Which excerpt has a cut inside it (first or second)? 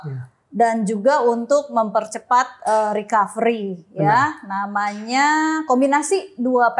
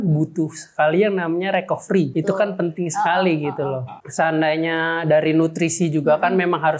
second